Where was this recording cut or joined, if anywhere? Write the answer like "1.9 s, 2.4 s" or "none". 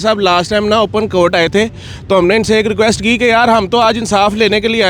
none